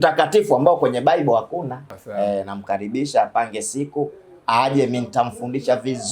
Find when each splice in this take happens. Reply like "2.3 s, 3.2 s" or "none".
2.0 s